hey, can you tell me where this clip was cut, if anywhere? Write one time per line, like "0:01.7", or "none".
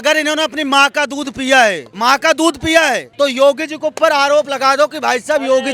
0:01.9
0:03.0